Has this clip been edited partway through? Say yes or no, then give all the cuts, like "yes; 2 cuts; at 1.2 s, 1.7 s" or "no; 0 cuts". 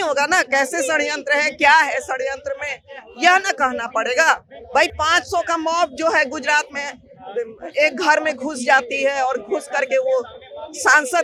no; 0 cuts